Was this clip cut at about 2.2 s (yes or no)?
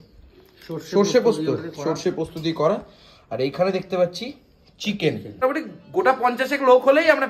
no